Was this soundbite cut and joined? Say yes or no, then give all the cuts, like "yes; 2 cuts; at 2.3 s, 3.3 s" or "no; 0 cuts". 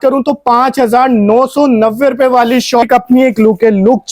yes; 1 cut; at 2.8 s